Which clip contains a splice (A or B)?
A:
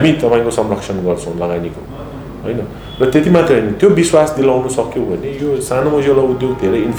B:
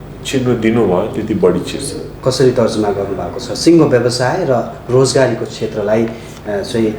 B